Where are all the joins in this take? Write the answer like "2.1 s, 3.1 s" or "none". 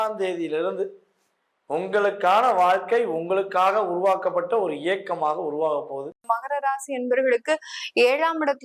6.3 s